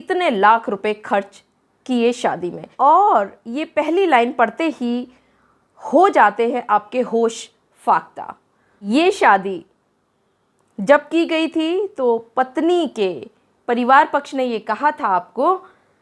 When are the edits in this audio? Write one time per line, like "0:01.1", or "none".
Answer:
0:02.6
0:08.9